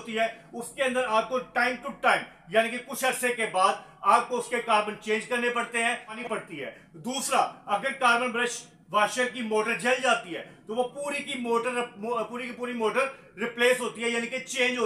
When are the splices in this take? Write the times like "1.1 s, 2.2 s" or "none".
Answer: 6.2 s